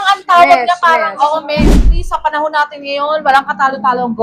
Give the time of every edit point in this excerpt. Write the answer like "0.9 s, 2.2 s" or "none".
2.0 s